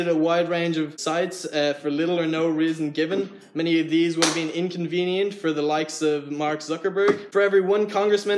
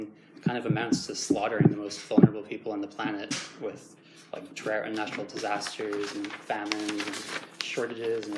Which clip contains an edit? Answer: first; 2 cuts; at 1.0 s, 7.2 s

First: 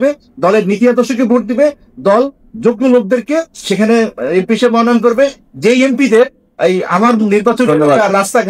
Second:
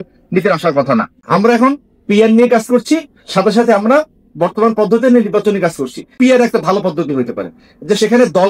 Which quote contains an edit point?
second; 2 cuts; at 1.2 s, 6.1 s

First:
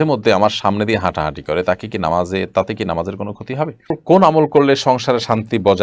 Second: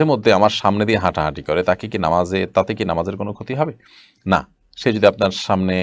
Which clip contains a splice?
first; 1 cut; at 4.0 s

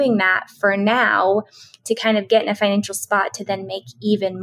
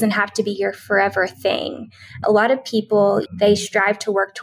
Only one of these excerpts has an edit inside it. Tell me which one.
second; 2 cuts; at 2.2 s, 3.3 s

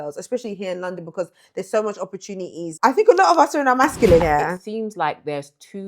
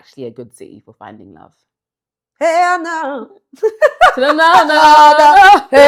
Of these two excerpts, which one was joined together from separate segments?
first; 2 cuts; at 2.6 s, 4.2 s

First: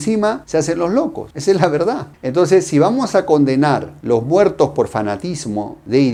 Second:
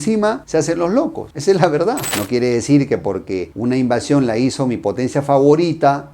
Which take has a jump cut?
second; 1 cut; at 2.1 s

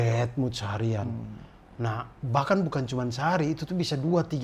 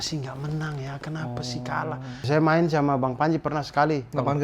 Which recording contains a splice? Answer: second; 1 cut; at 2.3 s

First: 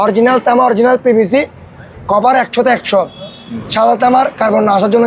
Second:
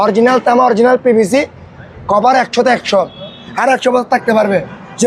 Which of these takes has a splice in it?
second; 1 cut; at 3.4 s

